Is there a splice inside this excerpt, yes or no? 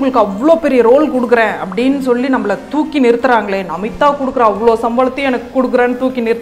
no